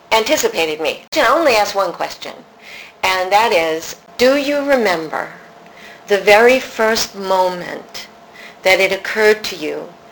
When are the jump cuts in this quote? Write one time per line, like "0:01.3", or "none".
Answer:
0:01.1
0:04.0